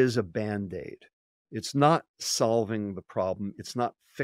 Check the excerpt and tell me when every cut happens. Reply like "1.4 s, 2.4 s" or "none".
none